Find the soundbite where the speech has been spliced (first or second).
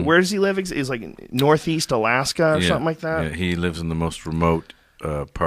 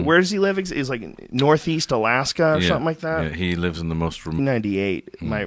first